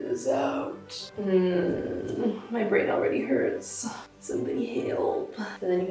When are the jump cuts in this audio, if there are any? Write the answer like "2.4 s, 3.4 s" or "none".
none